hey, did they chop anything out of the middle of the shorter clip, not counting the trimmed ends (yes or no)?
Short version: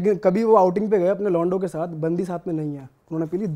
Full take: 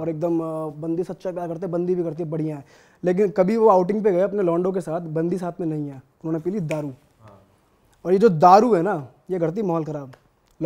no